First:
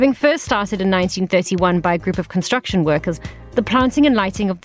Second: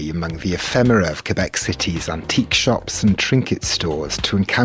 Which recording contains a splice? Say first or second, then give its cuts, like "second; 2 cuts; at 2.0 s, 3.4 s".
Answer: first; 1 cut; at 3.2 s